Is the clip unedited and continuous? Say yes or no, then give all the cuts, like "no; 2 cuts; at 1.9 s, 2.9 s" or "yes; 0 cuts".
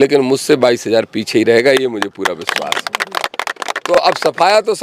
yes; 0 cuts